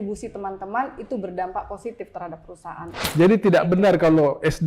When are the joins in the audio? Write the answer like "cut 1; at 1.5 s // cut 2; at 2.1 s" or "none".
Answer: cut 1; at 3.0 s